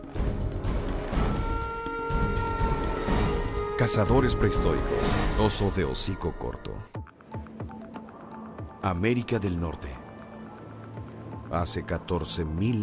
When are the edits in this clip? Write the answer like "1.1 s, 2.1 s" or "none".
none